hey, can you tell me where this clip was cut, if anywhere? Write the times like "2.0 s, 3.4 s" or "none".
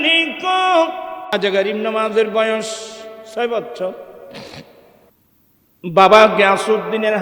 1.3 s